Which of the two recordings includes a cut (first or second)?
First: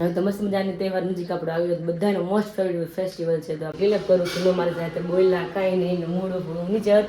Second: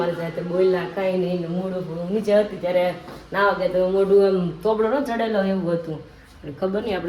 first